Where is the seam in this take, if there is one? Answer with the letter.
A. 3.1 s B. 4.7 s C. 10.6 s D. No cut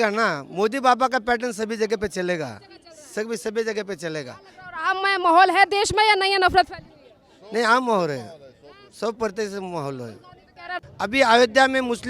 C